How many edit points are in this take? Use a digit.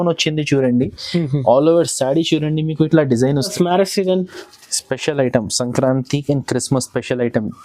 1